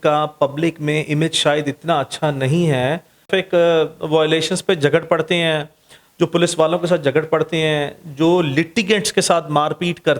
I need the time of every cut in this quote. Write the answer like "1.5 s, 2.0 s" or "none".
3.3 s

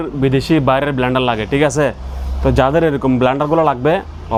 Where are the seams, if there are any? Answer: none

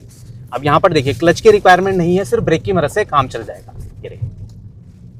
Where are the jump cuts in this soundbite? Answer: none

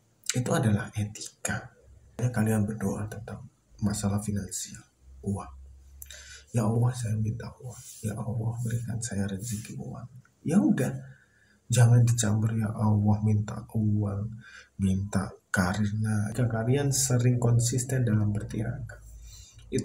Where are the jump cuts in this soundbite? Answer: 2.2 s, 16.3 s

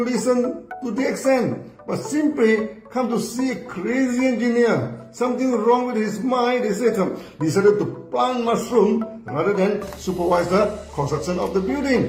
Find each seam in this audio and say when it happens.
none

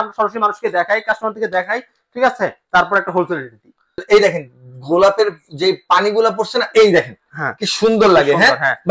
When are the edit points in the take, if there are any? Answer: 4.0 s

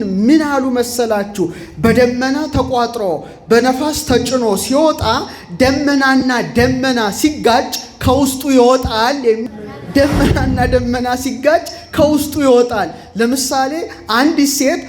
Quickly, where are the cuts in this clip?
9.4 s

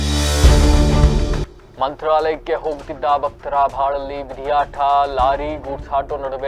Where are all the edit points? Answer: none

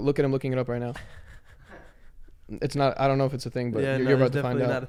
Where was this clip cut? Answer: none

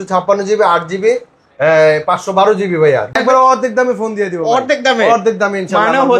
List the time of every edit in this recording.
3.1 s

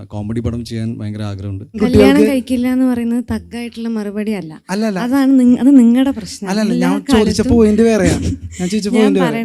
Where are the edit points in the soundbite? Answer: 1.8 s

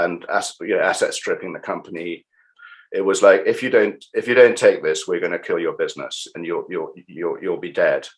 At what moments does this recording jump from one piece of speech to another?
2.6 s

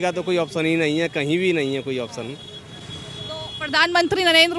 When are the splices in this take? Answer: none

